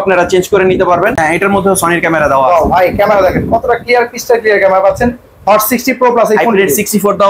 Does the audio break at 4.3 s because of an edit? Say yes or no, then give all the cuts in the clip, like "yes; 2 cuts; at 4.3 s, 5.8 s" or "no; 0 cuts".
no; 1 cut; at 1.1 s